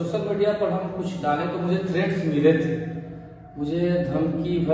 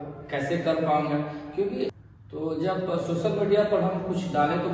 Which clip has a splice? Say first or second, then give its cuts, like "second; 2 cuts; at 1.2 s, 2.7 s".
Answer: second; 1 cut; at 1.9 s